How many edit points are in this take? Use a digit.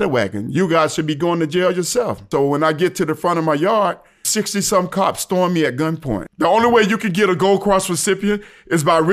3